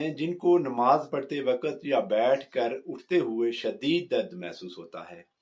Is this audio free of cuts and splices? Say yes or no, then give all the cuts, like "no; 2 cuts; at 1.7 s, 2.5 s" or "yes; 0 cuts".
yes; 0 cuts